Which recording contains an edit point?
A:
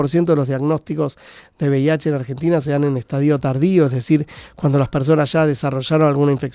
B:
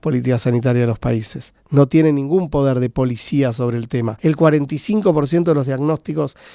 B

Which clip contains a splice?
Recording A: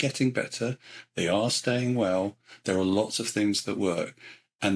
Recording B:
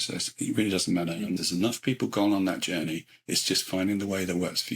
B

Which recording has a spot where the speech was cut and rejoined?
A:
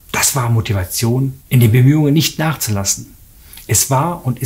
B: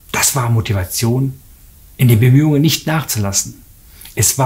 A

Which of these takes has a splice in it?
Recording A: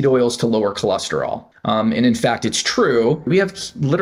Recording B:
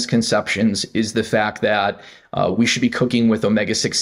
A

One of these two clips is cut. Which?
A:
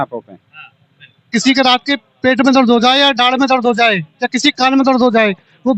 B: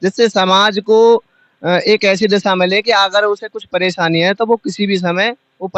A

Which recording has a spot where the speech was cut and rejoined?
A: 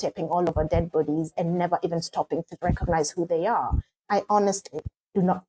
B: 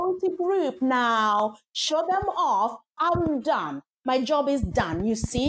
A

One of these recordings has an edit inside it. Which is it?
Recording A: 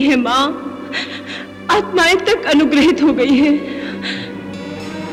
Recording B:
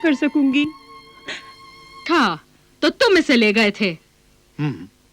B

